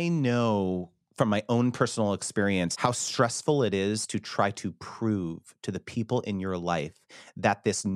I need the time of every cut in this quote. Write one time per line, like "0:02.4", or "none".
0:02.7